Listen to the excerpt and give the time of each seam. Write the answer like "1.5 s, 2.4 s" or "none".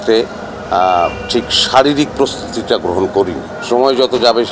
3.5 s